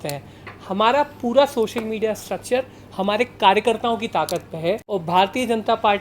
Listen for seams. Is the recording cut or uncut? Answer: cut